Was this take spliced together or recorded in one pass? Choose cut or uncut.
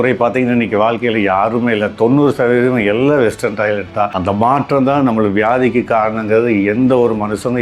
cut